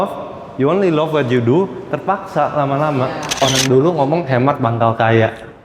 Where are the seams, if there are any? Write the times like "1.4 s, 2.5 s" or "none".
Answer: 3.2 s